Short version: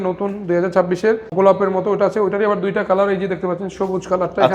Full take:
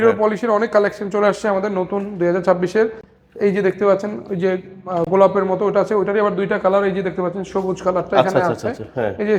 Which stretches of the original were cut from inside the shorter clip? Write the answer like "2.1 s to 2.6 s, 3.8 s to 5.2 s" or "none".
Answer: 3.0 s to 5.1 s